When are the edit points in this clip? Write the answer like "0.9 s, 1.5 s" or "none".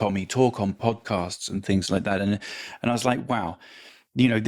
none